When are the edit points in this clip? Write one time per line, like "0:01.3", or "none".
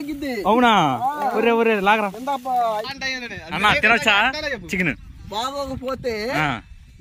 0:02.9